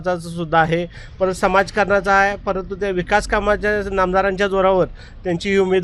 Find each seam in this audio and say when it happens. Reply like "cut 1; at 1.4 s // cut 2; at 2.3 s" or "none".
none